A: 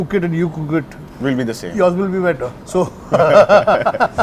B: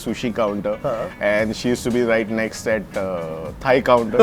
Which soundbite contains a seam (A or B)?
A